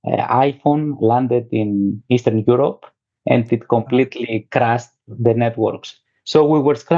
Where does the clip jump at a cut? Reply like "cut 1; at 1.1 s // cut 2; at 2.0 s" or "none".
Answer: none